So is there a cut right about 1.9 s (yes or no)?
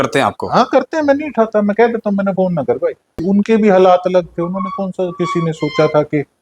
no